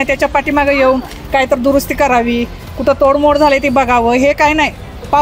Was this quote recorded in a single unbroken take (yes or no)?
yes